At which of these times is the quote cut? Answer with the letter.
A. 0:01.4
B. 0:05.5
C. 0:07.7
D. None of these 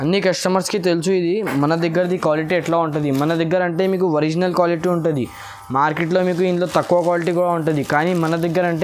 D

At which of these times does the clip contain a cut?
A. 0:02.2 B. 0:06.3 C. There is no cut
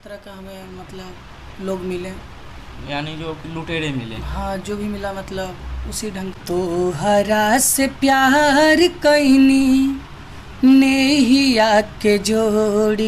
B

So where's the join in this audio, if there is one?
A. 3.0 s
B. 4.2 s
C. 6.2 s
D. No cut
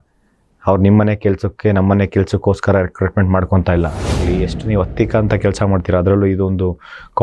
B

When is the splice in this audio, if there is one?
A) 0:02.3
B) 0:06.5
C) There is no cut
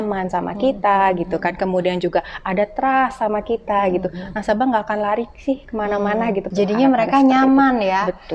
B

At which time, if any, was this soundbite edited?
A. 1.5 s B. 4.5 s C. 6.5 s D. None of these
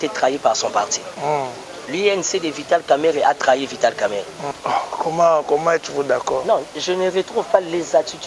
B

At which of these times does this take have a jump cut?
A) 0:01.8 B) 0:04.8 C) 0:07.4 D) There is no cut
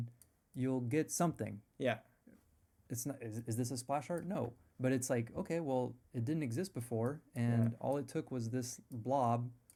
D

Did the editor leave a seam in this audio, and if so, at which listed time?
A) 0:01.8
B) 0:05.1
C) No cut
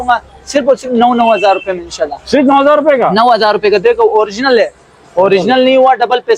C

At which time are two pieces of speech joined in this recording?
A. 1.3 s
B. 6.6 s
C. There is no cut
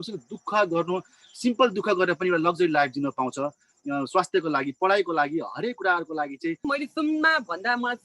B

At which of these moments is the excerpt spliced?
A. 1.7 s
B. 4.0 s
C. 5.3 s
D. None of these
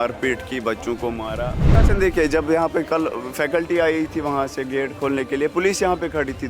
A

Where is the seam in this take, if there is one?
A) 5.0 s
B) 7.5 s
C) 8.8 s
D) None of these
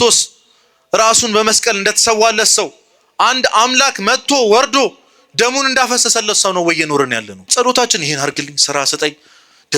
B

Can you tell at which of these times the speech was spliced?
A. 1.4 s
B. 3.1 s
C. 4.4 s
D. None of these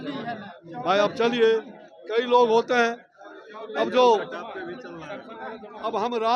D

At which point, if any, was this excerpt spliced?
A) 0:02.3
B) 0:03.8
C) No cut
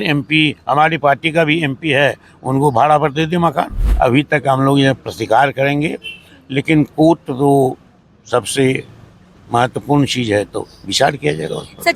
B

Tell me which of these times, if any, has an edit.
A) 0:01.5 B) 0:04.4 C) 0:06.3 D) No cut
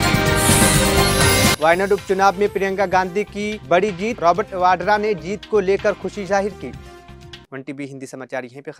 D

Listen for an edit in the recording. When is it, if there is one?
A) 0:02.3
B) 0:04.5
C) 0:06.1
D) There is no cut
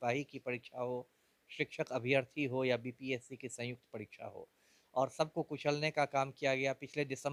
D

